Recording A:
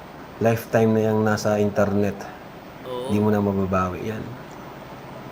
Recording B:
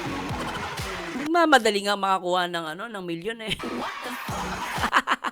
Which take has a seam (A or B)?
B